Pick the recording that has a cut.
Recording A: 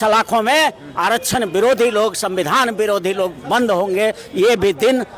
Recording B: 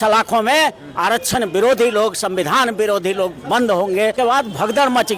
B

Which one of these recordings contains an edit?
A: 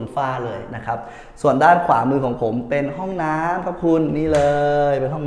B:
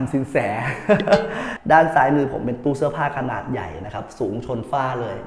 B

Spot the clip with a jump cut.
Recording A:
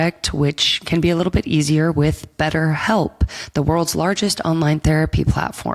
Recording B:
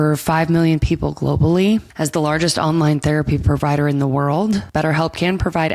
B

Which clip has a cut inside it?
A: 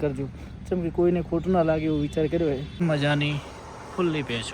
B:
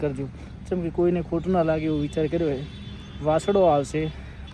A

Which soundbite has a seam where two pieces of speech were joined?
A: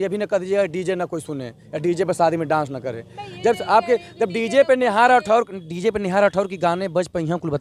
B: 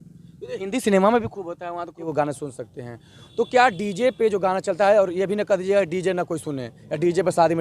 B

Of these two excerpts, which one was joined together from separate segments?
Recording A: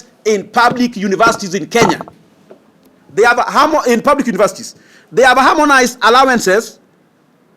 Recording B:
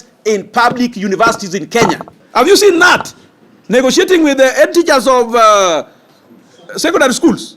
B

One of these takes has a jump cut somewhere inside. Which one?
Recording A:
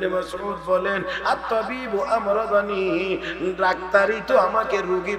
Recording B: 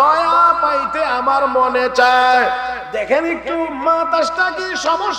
B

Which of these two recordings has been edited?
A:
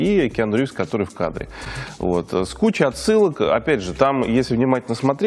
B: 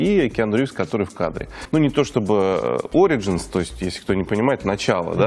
B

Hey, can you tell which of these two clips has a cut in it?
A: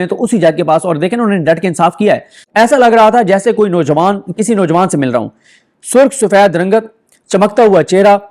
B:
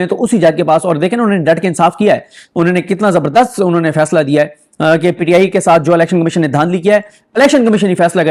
A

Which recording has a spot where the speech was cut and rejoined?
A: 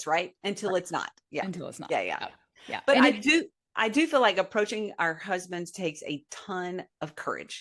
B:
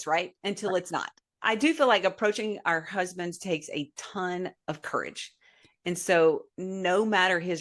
B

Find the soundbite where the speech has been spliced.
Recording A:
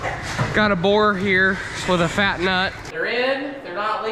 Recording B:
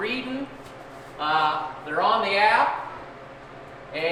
A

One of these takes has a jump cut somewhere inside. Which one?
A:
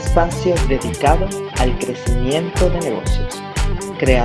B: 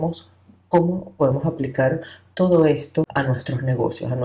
B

